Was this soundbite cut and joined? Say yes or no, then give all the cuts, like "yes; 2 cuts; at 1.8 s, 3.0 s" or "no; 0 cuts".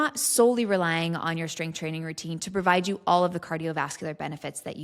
no; 0 cuts